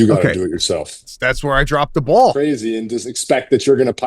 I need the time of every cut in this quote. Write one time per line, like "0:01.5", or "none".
0:01.1
0:02.3